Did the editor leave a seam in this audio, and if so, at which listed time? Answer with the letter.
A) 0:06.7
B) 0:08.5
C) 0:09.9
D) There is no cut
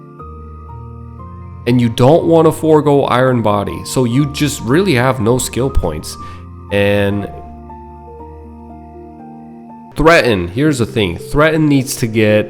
C